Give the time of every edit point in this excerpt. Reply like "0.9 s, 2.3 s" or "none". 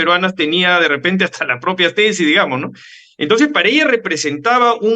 none